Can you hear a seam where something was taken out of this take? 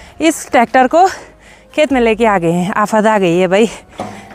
no; 0 cuts

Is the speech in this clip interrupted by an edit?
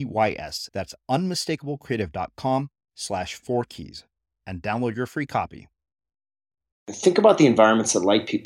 yes; 1 cut; at 7.0 s

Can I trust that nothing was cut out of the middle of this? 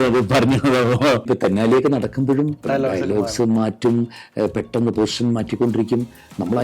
no; 2 cuts; at 1.3 s, 2.6 s

